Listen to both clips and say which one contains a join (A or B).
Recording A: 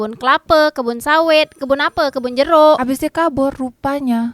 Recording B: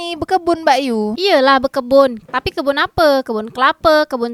A